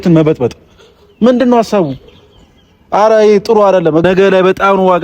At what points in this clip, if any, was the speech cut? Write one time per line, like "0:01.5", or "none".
0:04.0